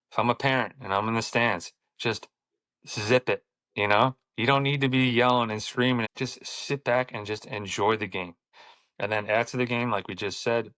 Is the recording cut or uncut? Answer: cut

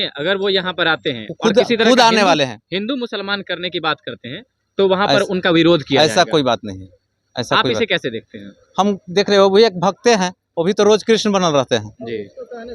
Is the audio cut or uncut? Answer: uncut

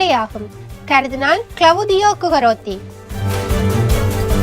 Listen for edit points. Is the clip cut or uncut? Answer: cut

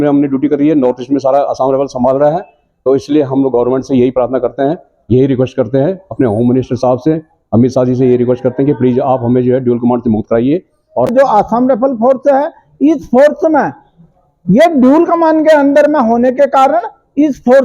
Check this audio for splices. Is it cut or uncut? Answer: cut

